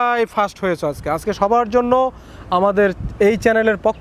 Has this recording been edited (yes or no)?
no